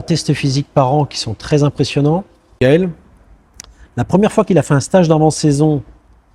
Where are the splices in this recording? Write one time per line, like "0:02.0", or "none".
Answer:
0:02.6